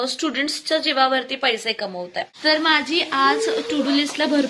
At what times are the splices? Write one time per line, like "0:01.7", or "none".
0:02.3